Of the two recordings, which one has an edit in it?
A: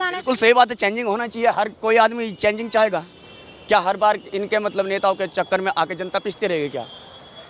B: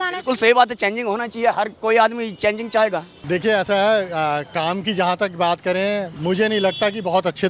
B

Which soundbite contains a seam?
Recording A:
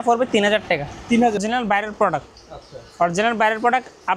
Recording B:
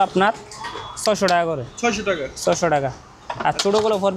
A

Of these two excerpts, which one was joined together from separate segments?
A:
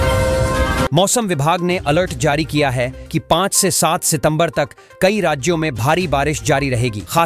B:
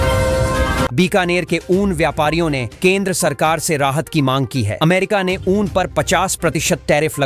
A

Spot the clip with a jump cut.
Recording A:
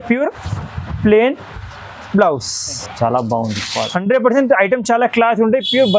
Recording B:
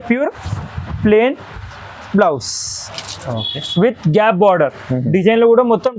A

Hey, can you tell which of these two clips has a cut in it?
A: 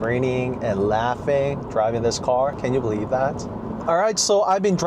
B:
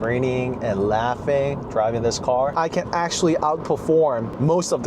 B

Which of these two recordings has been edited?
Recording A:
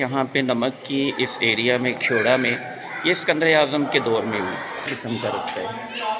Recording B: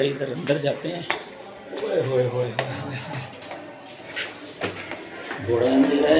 A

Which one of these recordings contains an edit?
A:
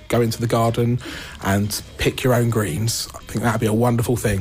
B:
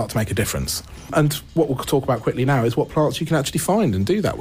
A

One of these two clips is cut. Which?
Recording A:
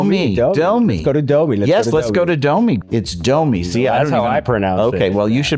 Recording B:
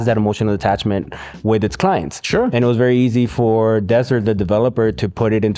A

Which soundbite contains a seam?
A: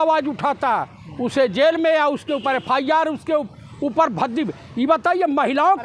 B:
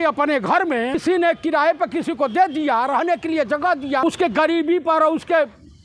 B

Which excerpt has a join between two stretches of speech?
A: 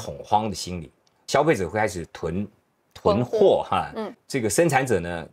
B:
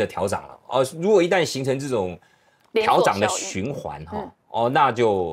A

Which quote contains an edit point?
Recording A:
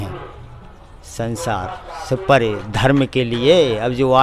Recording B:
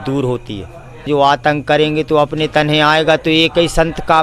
B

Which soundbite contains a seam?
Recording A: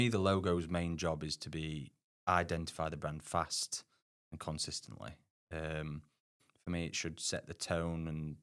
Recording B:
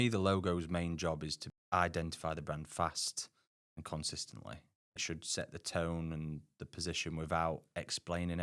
B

